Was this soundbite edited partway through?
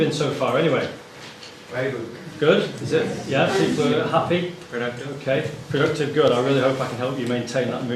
no; 0 cuts

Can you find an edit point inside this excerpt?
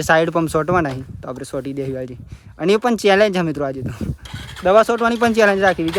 no; 0 cuts

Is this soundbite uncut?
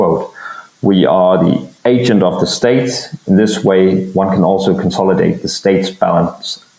yes; 0 cuts

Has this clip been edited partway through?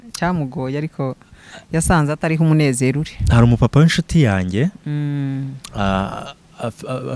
no; 0 cuts

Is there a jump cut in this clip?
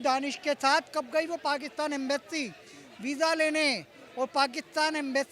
no; 0 cuts

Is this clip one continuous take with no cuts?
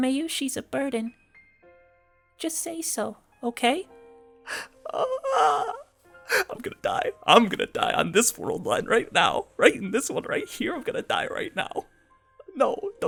yes; 0 cuts

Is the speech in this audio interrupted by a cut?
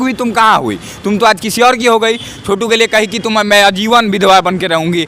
no; 0 cuts

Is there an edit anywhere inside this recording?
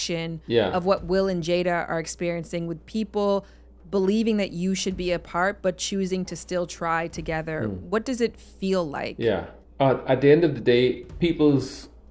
yes; 1 cut; at 9.6 s

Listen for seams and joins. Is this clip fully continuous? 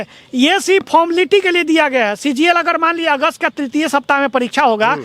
yes; 0 cuts

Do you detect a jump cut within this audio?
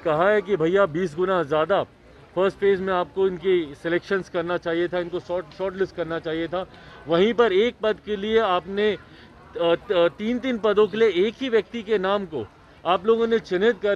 no; 0 cuts

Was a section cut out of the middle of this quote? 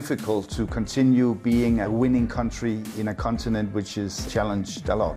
yes; 3 cuts; at 1.9 s, 2.9 s, 4.2 s

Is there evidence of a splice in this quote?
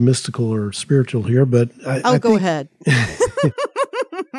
no; 0 cuts

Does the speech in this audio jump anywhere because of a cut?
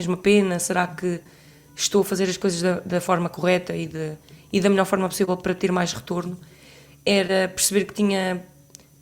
no; 0 cuts

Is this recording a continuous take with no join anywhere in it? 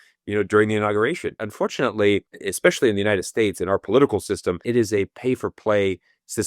no; 3 cuts; at 1.4 s, 2.4 s, 4.6 s

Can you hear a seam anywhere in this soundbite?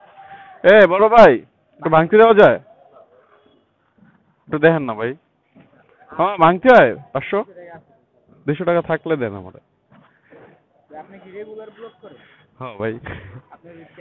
no; 0 cuts

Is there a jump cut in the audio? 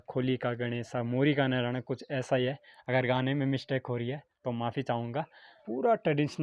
no; 0 cuts

